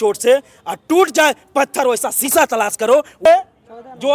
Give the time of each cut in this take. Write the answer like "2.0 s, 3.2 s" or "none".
3.1 s